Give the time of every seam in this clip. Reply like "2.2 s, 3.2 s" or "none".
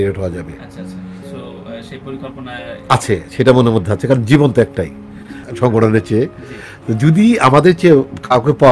5.4 s